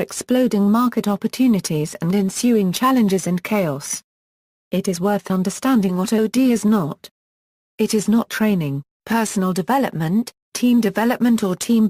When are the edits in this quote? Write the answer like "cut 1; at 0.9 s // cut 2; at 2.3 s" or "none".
cut 1; at 10.4 s